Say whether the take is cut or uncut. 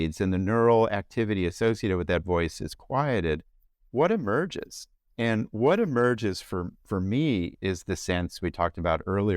cut